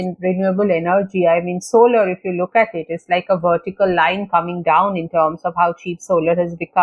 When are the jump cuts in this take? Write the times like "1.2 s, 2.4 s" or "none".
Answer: none